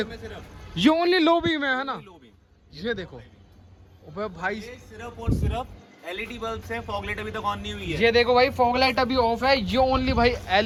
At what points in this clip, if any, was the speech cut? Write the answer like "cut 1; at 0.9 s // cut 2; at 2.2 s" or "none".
none